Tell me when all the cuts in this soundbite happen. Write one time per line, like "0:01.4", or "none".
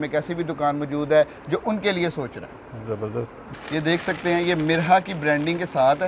0:03.5